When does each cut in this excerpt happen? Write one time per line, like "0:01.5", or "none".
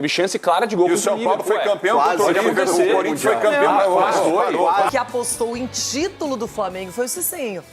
0:04.9